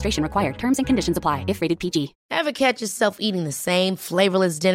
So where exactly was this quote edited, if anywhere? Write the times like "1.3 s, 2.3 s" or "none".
2.2 s

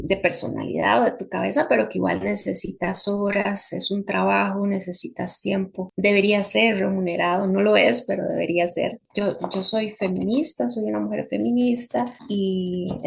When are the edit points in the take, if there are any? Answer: 5.8 s, 9.0 s, 12.2 s

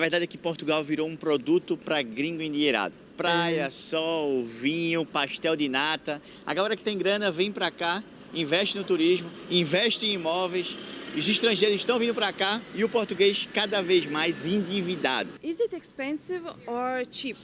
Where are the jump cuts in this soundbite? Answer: none

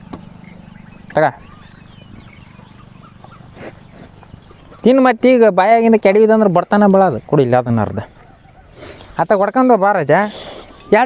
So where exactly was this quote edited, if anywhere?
none

